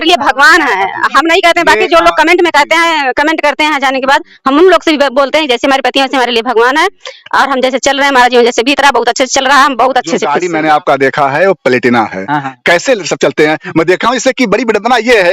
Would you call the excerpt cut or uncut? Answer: cut